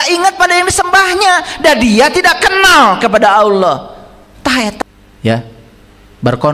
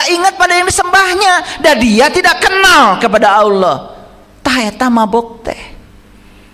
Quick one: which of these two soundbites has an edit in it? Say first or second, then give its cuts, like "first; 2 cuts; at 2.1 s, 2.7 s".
first; 1 cut; at 4.8 s